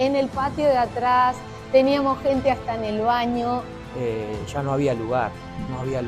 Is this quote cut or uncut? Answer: cut